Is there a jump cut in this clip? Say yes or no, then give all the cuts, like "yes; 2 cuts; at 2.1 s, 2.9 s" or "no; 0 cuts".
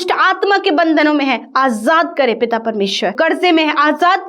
yes; 1 cut; at 3.1 s